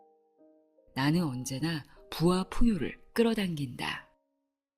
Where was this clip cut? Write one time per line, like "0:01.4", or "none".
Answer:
0:00.9
0:04.0